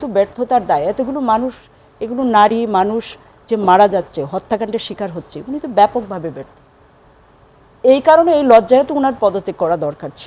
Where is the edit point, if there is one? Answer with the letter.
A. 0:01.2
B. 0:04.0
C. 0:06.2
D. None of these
D